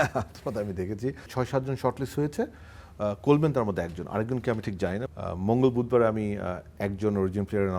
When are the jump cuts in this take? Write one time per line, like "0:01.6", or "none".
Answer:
0:01.2
0:05.0